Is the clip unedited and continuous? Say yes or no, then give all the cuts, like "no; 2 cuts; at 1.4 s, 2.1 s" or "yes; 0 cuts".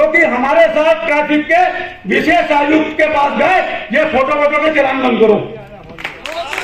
yes; 0 cuts